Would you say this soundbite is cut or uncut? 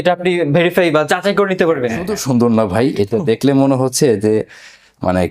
cut